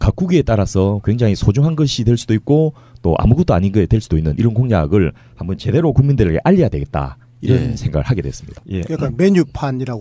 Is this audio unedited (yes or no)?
yes